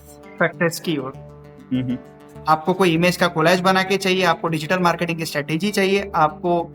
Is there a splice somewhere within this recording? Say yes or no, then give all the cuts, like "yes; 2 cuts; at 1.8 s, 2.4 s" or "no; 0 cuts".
yes; 1 cut; at 1.6 s